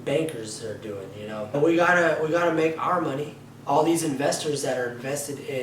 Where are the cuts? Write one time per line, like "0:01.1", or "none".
0:01.5